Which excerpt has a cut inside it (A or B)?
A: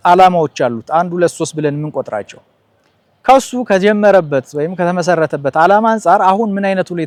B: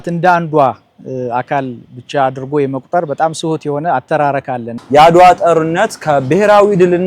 B